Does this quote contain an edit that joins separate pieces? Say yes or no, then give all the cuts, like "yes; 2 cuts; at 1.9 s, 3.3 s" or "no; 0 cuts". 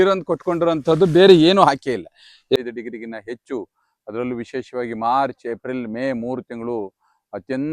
yes; 1 cut; at 2.6 s